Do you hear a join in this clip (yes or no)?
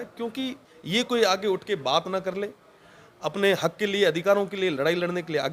no